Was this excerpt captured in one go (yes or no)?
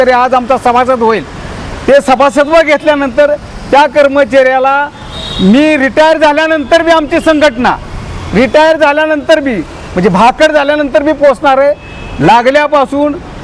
yes